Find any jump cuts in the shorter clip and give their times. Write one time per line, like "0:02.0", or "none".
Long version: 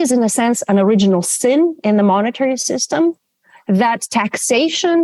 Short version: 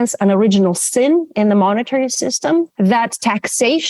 0:02.7